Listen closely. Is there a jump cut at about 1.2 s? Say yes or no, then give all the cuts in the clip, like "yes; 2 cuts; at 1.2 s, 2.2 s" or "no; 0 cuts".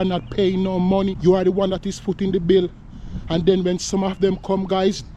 yes; 1 cut; at 1.2 s